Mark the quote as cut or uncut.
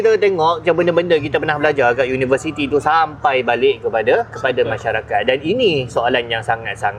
uncut